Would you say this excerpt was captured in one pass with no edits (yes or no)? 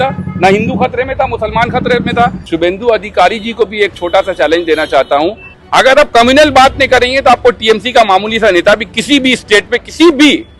no